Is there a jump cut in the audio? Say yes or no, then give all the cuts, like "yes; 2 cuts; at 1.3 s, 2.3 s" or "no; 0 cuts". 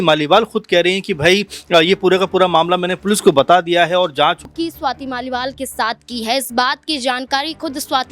yes; 1 cut; at 4.4 s